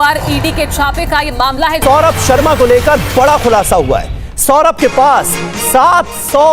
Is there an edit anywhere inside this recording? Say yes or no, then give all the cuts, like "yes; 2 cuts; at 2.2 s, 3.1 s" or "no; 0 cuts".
yes; 1 cut; at 1.7 s